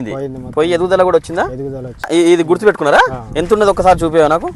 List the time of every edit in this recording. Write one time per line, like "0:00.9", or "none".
0:02.0